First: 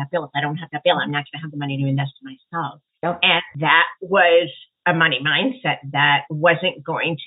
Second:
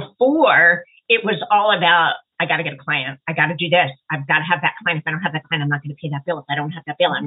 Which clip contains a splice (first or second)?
first